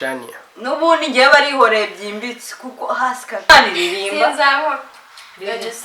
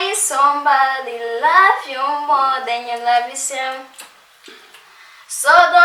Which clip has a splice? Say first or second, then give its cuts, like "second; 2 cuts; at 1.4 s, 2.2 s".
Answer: first; 1 cut; at 3.5 s